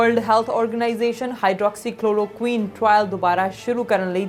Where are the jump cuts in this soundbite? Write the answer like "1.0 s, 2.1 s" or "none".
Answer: none